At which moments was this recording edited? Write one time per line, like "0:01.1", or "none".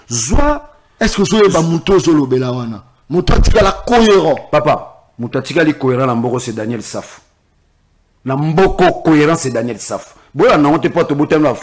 none